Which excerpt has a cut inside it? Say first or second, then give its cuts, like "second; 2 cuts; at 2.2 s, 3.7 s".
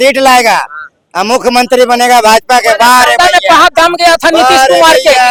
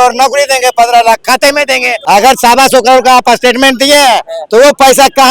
second; 1 cut; at 1.9 s